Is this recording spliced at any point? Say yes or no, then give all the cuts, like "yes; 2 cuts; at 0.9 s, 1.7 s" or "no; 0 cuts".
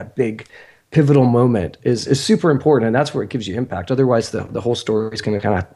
no; 0 cuts